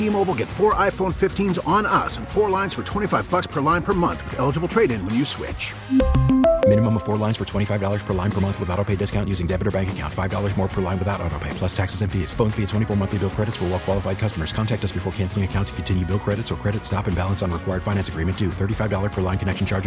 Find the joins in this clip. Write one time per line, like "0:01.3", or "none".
none